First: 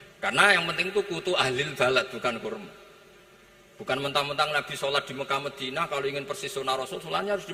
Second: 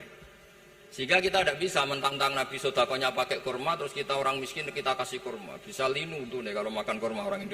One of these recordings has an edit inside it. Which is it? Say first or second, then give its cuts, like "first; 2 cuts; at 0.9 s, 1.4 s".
second; 1 cut; at 2.1 s